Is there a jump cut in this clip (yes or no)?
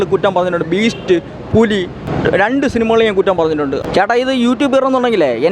yes